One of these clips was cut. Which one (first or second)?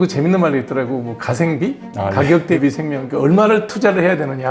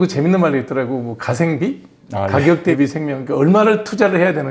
first